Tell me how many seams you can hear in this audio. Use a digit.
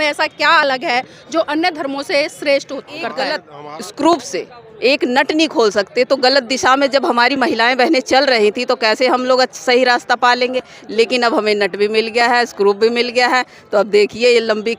1